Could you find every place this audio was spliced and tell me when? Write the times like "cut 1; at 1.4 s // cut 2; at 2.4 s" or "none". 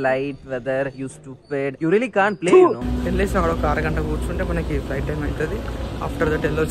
cut 1; at 2.8 s